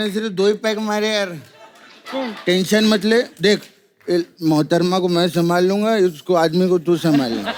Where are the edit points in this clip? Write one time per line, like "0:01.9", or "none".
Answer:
none